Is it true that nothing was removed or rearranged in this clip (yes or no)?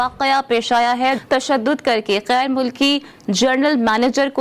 no